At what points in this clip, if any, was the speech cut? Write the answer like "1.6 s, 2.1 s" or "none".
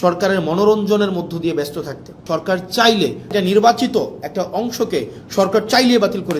2.1 s, 3.3 s